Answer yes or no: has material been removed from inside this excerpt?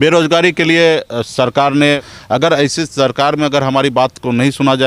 yes